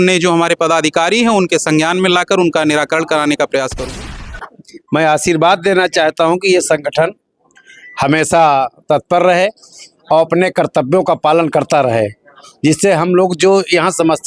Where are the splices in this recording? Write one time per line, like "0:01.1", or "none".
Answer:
0:04.0

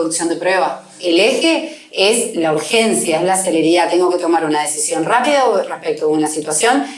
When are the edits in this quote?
0:00.9

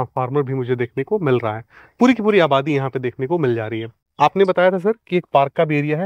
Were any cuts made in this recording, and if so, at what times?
none

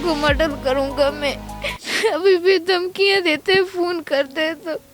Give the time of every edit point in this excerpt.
none

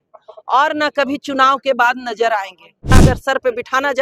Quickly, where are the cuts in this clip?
0:02.9

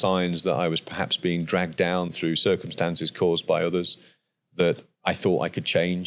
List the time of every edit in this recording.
none

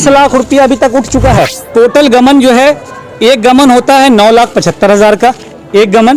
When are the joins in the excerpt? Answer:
0:01.6

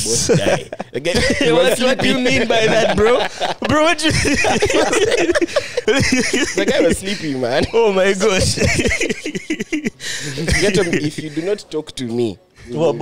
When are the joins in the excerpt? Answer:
0:05.8

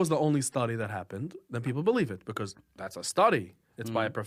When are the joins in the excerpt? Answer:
none

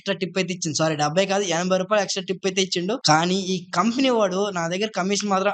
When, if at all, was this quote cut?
0:03.0

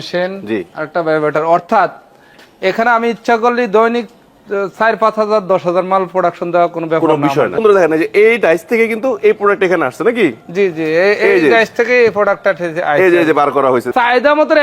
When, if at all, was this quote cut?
0:07.6
0:13.9

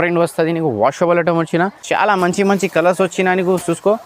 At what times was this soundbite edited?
0:01.8

